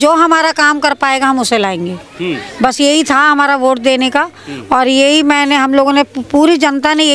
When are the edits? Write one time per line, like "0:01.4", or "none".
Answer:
none